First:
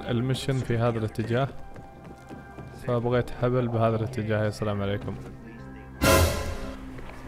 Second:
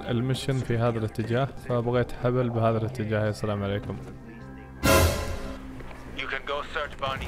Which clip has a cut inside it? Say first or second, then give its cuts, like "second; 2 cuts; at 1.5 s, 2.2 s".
second; 1 cut; at 1.6 s